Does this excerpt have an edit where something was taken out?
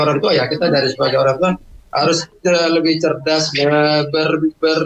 no; 0 cuts

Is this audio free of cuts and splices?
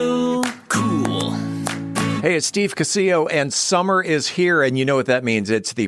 no; 1 cut; at 2.2 s

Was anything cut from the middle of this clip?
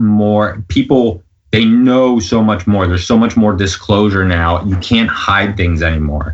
no; 0 cuts

